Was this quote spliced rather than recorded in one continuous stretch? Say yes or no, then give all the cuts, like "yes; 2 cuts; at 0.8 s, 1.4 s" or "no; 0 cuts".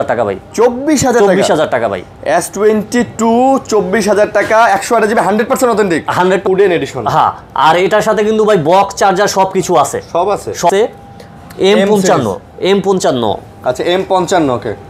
yes; 2 cuts; at 6.4 s, 10.7 s